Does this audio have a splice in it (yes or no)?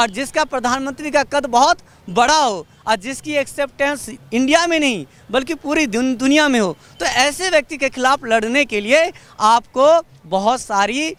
no